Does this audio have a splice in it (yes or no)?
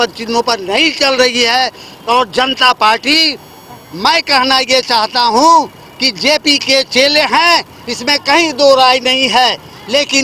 no